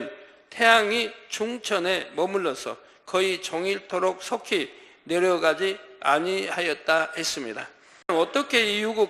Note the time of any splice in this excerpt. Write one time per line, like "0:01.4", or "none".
0:08.1